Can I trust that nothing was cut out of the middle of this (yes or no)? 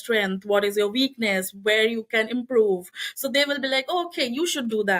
yes